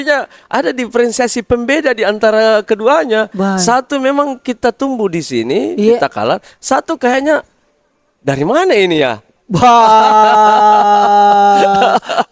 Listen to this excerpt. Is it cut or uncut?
uncut